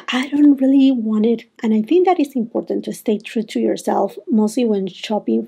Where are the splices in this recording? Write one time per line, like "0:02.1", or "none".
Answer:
0:01.6